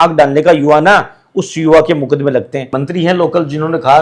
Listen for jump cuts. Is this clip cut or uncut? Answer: cut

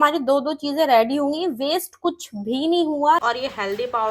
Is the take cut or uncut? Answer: cut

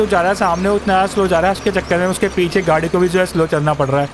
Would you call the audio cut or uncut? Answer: uncut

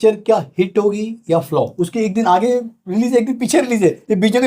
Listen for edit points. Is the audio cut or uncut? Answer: cut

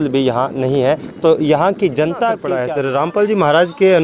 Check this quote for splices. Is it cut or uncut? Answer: cut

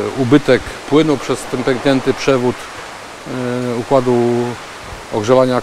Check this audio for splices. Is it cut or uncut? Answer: uncut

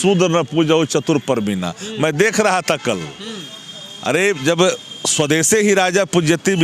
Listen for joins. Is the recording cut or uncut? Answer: uncut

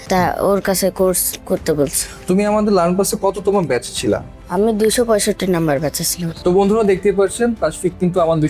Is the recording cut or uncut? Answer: cut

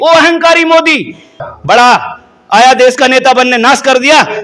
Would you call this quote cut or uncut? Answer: uncut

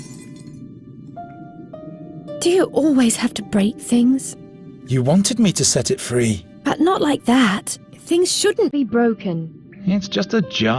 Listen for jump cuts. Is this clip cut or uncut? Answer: cut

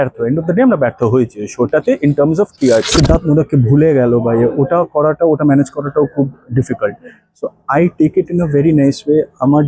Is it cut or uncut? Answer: cut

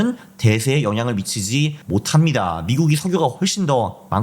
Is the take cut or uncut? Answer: cut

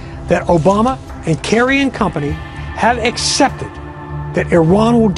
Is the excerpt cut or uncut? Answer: uncut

